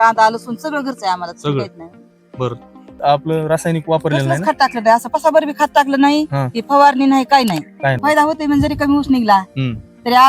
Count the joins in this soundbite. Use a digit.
2